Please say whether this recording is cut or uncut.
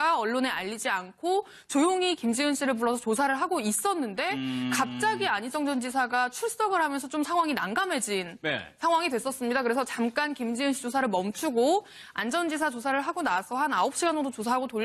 cut